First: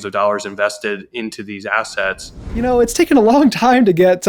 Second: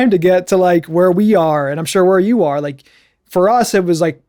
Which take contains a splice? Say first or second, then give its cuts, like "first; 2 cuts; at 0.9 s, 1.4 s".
first; 1 cut; at 2.6 s